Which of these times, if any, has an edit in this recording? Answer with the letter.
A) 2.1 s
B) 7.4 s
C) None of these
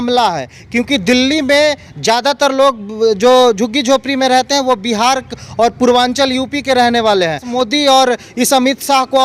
B